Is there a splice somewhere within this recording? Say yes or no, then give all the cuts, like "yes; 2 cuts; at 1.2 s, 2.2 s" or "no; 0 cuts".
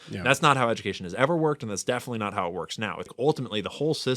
yes; 1 cut; at 3.1 s